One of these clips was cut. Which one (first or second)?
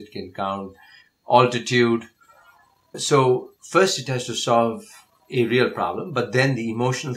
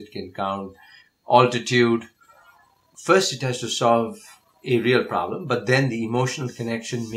second